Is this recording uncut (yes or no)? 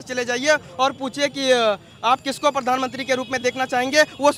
yes